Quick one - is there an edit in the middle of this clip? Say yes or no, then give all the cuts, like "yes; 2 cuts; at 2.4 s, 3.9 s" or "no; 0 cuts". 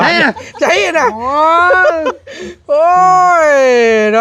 no; 0 cuts